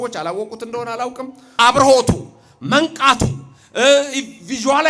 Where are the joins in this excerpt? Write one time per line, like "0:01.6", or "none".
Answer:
0:01.5